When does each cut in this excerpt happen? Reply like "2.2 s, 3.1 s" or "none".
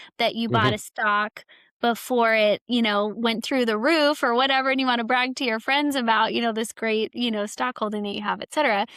none